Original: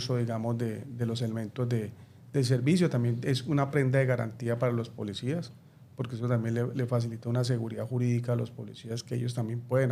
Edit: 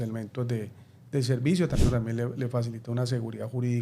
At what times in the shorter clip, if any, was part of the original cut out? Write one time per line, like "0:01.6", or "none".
0:01.7